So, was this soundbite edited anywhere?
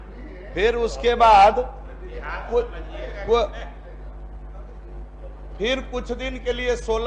no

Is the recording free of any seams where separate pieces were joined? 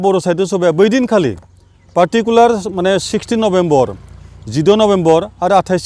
yes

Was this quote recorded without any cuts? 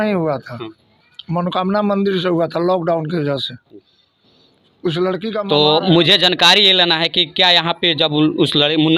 yes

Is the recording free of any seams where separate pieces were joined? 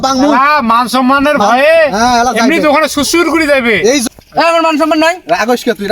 no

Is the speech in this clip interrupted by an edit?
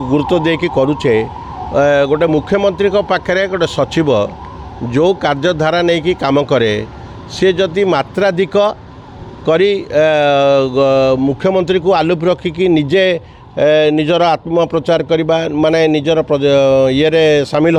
no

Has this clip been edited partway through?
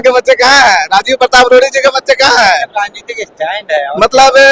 no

